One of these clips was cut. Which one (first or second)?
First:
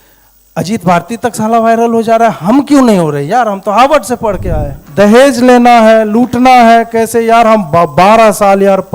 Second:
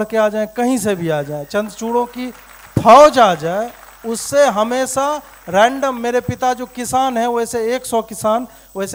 first